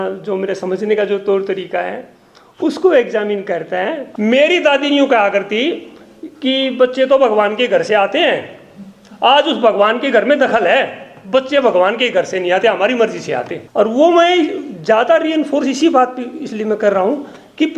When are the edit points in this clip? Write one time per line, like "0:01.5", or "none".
0:04.0
0:13.6